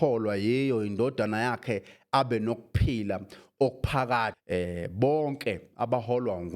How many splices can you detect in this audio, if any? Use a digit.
1